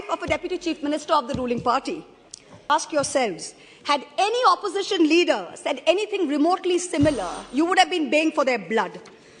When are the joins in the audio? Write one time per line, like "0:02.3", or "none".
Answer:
0:02.6